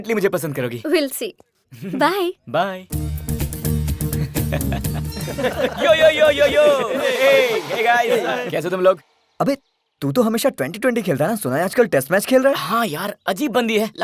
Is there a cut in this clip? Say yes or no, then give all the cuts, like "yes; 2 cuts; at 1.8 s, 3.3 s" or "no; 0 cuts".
yes; 2 cuts; at 2.9 s, 5.1 s